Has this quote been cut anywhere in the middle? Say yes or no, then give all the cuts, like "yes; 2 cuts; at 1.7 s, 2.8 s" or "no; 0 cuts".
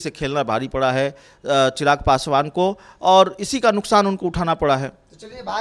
no; 0 cuts